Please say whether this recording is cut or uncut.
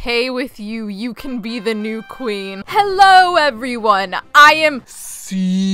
cut